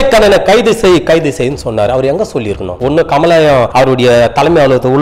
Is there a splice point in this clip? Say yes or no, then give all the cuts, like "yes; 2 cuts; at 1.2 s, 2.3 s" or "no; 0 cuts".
yes; 2 cuts; at 2.7 s, 3.7 s